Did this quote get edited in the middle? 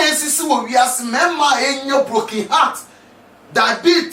no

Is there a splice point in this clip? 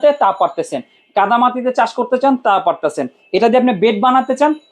no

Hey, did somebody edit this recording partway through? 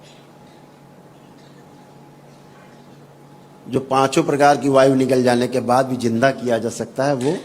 no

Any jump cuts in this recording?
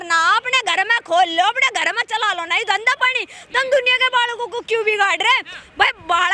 no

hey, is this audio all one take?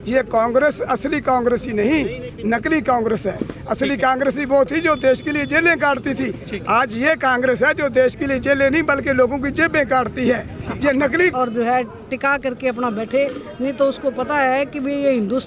no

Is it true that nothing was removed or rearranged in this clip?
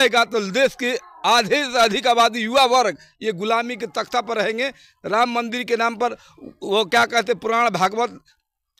yes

